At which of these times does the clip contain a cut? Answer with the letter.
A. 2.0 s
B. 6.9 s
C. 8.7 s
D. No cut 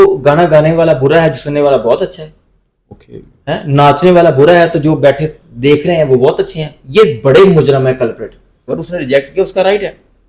C